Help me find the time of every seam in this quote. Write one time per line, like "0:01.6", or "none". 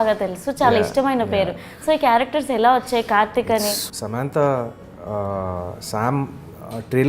0:03.8